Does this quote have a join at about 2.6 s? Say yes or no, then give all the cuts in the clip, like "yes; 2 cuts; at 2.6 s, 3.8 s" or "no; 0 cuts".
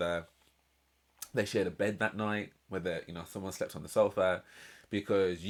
no; 0 cuts